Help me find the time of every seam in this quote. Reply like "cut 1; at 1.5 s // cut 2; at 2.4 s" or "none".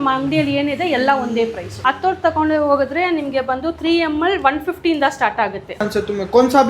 cut 1; at 1.7 s // cut 2; at 5.8 s